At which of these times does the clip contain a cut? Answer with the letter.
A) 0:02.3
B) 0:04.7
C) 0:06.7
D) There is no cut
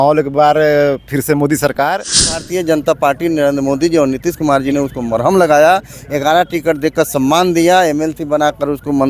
A